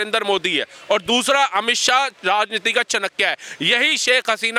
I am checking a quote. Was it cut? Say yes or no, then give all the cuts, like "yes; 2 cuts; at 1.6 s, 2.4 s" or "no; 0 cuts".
no; 0 cuts